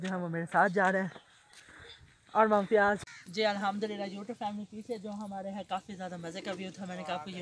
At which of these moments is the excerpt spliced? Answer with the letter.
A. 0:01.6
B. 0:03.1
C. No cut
B